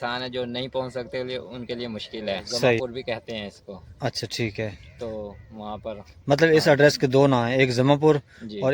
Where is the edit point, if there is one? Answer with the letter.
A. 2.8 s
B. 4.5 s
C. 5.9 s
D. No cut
A